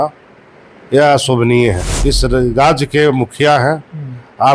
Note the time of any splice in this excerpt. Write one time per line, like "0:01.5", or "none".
0:01.9